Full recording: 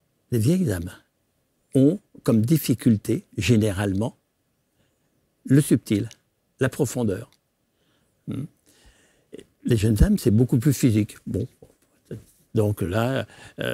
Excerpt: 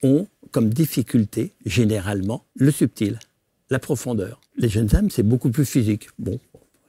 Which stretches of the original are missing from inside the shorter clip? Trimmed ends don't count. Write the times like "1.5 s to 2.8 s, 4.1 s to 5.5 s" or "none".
4.2 s to 5.4 s, 7.3 s to 9.5 s